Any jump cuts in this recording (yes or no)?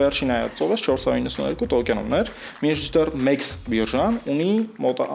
no